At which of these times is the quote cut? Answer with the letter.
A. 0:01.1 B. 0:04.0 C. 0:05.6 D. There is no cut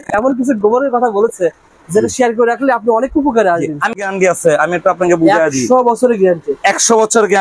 B